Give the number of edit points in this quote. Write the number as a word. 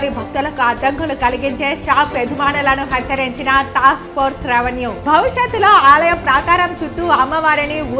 zero